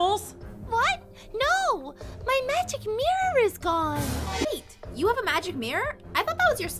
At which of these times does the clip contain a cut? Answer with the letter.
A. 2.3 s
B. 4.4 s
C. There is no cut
B